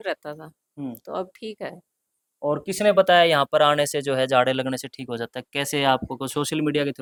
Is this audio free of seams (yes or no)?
yes